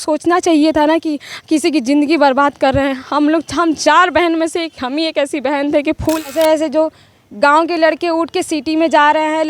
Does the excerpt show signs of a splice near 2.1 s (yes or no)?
no